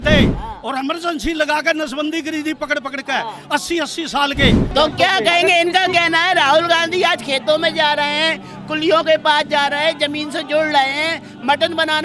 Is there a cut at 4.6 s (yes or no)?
yes